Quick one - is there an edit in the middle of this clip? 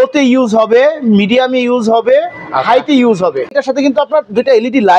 yes; 1 cut; at 3.5 s

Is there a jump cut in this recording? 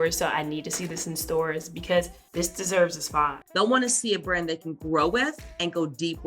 yes; 2 cuts; at 2.2 s, 3.4 s

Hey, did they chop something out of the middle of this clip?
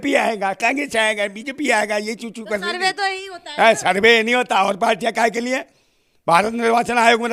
no; 0 cuts

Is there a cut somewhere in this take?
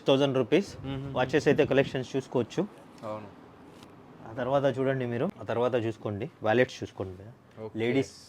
yes; 1 cut; at 5.4 s

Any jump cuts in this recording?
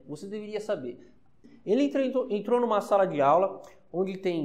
yes; 1 cut; at 1.4 s

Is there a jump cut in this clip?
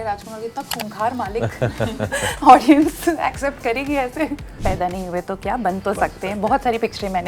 yes; 1 cut; at 4.6 s

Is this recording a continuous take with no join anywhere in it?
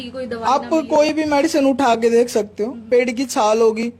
no; 1 cut; at 2.8 s

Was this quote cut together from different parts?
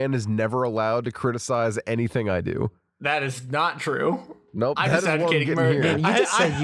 no; 0 cuts

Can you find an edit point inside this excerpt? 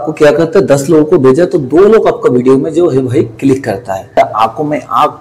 yes; 1 cut; at 4.2 s

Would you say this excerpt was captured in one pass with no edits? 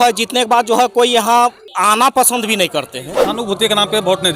no; 2 cuts; at 1.7 s, 3.2 s

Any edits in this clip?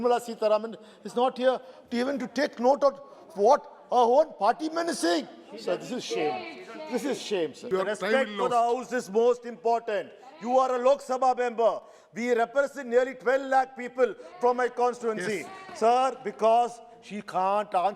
yes; 1 cut; at 7.7 s

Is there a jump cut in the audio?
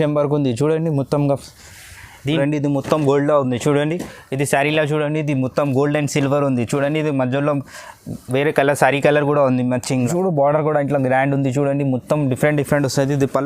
yes; 2 cuts; at 2.3 s, 9.9 s

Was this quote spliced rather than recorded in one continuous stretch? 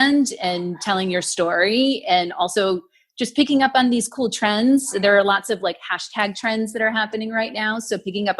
no; 0 cuts

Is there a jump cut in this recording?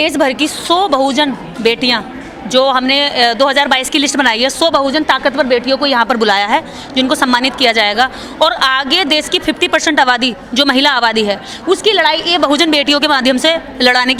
no; 0 cuts

